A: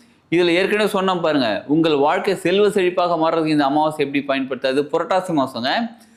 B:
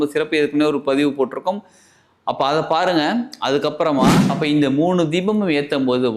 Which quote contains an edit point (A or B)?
B